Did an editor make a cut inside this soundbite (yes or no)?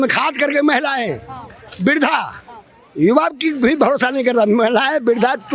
no